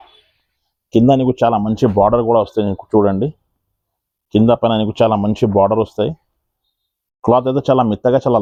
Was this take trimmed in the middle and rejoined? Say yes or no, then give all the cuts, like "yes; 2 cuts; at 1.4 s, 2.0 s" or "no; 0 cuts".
no; 0 cuts